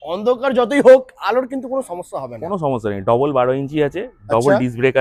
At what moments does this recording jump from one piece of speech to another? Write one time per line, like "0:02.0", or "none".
none